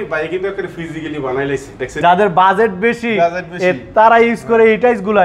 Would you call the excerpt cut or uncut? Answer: cut